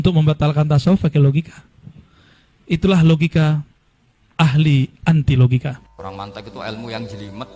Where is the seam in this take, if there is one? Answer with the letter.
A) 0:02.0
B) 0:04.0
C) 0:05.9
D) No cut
C